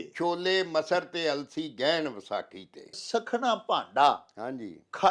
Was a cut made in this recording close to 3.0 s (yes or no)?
yes